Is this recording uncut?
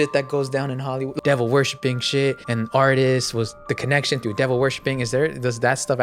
no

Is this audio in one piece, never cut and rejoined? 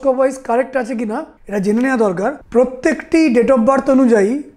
no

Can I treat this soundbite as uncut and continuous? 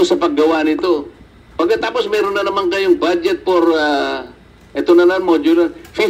no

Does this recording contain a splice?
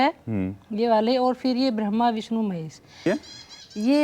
yes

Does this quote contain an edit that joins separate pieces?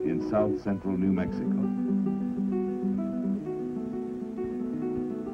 yes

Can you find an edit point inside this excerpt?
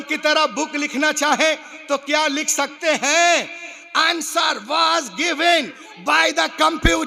no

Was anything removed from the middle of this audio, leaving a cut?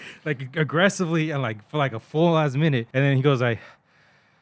yes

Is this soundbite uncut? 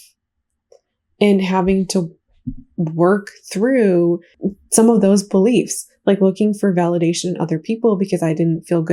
no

